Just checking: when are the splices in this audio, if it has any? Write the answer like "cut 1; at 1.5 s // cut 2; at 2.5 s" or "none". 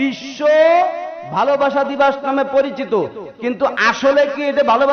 none